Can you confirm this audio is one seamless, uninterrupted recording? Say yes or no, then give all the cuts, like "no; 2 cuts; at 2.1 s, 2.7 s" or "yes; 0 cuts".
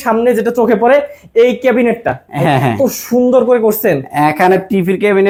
yes; 0 cuts